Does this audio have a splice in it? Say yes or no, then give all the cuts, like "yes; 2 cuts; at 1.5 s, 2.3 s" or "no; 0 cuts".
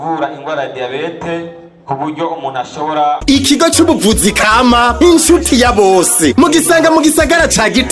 yes; 1 cut; at 3.2 s